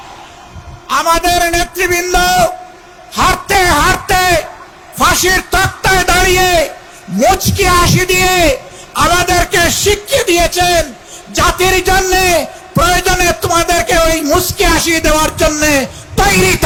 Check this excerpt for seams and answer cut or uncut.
uncut